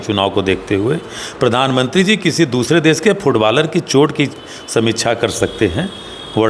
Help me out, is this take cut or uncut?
uncut